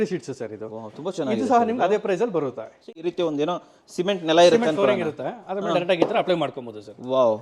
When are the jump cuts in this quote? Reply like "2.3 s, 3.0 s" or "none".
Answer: 2.8 s